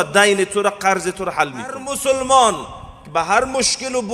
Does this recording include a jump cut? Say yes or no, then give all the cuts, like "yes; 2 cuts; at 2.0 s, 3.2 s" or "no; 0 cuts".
yes; 1 cut; at 1.9 s